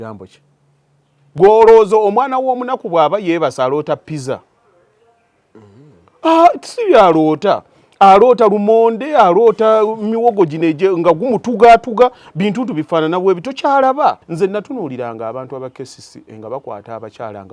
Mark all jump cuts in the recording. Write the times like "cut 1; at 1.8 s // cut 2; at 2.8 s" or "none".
cut 1; at 1.2 s // cut 2; at 14.2 s